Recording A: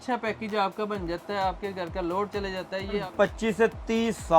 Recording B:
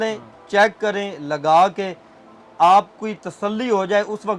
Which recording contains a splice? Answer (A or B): A